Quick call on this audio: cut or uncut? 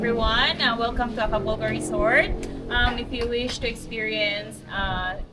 uncut